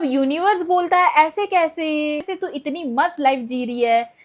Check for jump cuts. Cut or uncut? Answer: uncut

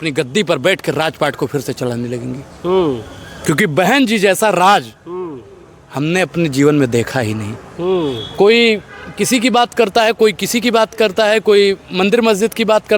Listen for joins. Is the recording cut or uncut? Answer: uncut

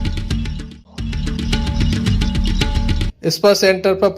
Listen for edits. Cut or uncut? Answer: cut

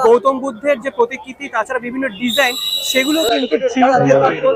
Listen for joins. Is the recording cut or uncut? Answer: uncut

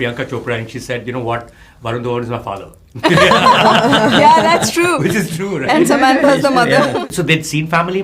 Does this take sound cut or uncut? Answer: cut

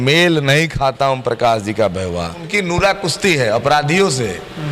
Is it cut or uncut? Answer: cut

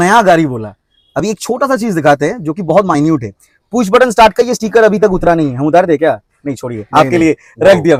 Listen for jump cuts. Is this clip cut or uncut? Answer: uncut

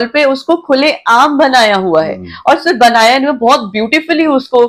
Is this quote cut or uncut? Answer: uncut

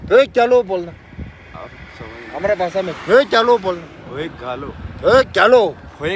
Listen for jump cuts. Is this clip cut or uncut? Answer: uncut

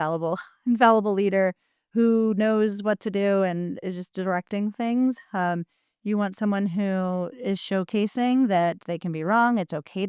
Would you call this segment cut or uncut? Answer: uncut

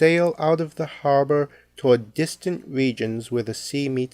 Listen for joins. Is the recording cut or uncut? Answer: cut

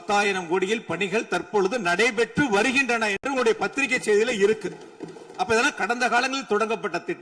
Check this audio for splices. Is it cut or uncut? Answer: uncut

